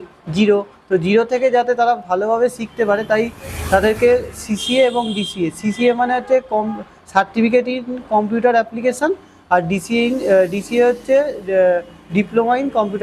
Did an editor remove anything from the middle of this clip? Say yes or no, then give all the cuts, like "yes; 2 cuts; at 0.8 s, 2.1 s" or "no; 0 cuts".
no; 0 cuts